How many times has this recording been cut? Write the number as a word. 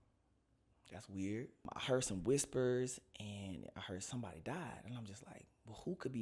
one